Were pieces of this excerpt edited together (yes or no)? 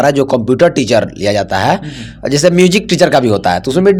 no